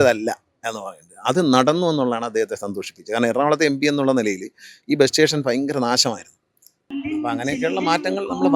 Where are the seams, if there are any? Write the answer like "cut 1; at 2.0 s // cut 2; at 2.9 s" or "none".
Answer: cut 1; at 6.9 s